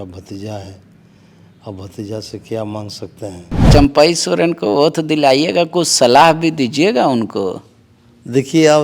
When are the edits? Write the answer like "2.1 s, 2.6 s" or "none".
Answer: 3.7 s